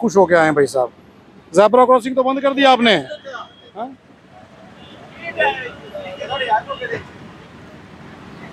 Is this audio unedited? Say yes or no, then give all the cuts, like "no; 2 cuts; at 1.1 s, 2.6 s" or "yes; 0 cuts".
yes; 0 cuts